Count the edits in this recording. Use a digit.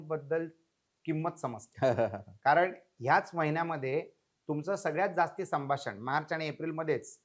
0